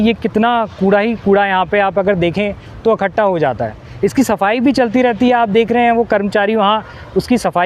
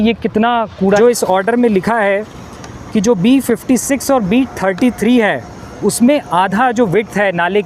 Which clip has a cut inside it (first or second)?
second